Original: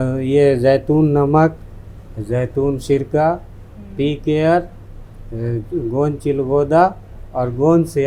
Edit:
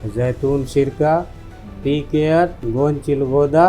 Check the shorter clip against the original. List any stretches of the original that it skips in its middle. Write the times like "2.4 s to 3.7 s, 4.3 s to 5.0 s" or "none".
4.8 s to 5.8 s

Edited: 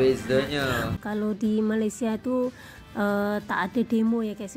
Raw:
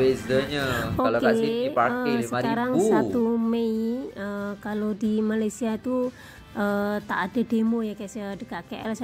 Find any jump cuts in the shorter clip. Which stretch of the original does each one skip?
0.9 s to 4.5 s

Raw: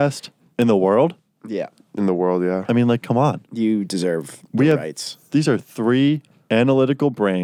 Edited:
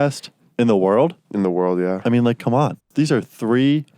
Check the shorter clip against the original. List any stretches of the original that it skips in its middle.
1.2 s to 1.9 s, 3.4 s to 5.2 s

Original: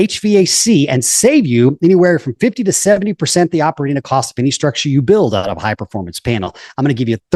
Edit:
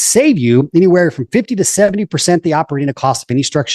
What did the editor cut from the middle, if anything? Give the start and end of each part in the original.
none

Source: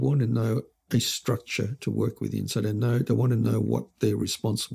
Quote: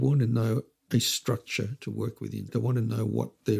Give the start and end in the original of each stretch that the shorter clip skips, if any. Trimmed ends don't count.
2.5 s to 3.1 s

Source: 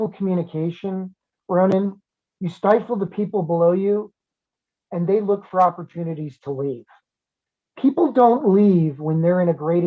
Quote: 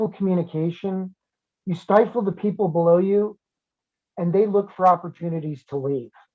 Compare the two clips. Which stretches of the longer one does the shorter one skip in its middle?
1.3 s to 2.1 s

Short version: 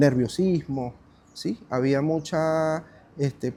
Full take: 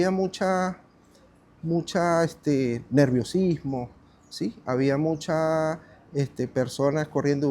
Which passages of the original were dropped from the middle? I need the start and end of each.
none

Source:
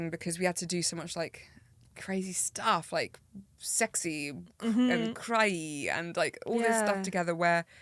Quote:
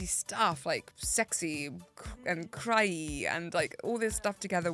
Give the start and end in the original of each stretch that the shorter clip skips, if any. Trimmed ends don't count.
3.2 s to 3.6 s

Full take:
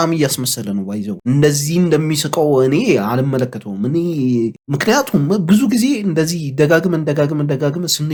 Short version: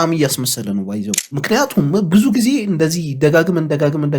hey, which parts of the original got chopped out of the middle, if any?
1.2 s to 4.6 s

